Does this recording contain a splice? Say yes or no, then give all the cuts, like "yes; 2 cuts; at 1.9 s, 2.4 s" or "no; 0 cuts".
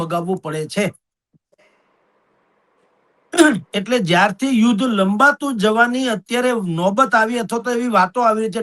no; 0 cuts